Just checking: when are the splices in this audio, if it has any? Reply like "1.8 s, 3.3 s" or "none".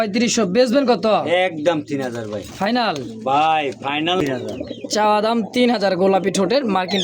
4.2 s